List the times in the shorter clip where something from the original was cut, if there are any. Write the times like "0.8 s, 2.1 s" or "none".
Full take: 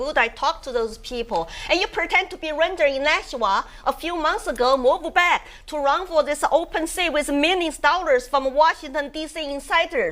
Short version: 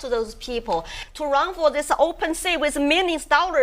0.9 s